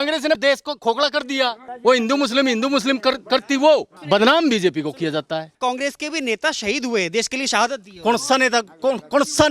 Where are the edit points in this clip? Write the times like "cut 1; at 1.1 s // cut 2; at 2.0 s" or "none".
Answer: cut 1; at 1.7 s // cut 2; at 3.9 s // cut 3; at 5.5 s